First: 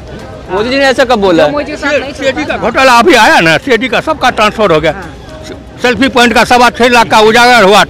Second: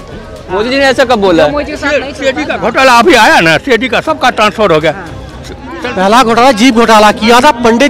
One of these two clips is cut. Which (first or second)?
second